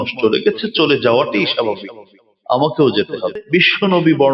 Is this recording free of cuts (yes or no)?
no